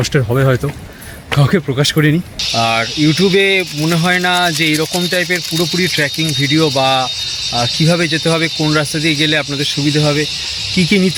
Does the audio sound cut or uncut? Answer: cut